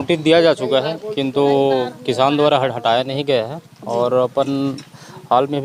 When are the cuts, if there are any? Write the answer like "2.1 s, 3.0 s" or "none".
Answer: none